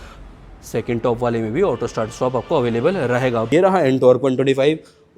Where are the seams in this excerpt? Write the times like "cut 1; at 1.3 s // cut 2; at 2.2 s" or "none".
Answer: cut 1; at 3.5 s